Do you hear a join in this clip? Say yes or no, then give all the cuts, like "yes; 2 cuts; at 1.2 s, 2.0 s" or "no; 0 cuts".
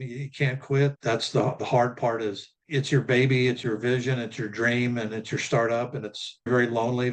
no; 0 cuts